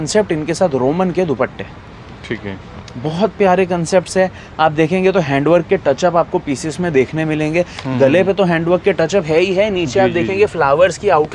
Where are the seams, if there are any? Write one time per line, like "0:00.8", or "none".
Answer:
none